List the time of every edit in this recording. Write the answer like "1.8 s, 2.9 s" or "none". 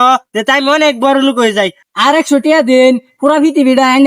1.8 s

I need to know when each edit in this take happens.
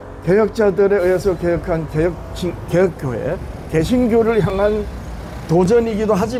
none

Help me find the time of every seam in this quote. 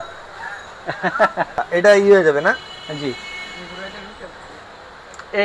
1.6 s

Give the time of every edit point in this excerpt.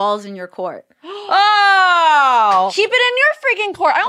2.7 s

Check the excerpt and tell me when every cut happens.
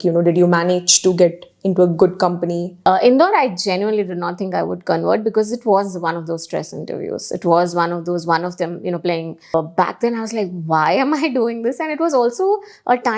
2.7 s, 9.5 s

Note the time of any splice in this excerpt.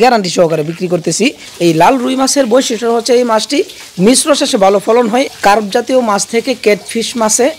1.4 s, 5.3 s

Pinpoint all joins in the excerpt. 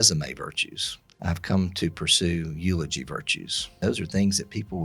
1.2 s, 3.8 s

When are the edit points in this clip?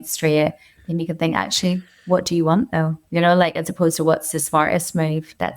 none

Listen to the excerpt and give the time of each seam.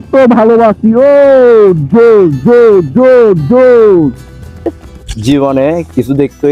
4.8 s

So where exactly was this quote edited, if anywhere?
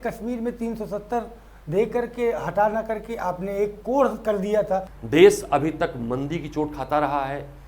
4.9 s

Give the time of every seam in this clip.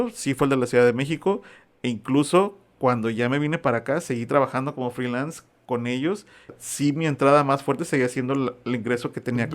6.6 s

